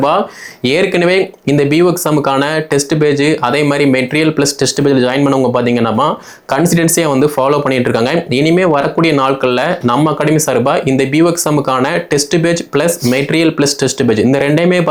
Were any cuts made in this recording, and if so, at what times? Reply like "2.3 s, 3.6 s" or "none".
none